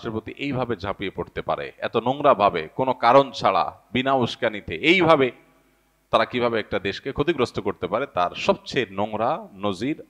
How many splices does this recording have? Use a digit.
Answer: 0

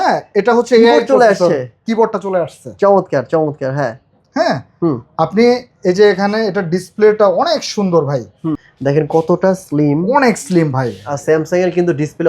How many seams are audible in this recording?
1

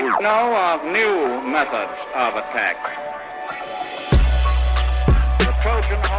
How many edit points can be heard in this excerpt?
0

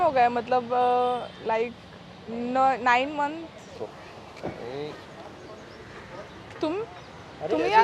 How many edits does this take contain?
1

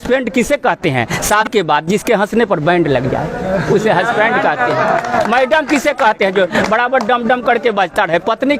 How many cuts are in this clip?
1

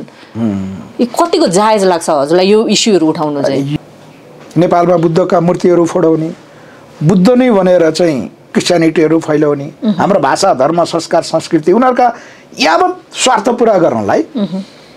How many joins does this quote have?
1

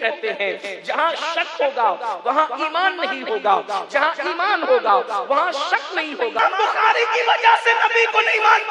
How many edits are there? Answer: 1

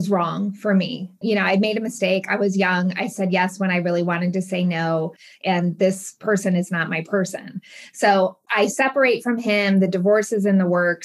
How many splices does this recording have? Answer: 2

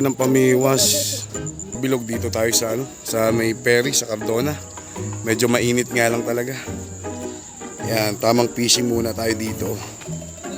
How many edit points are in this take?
1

